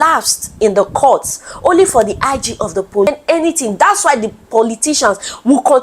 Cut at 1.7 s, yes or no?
no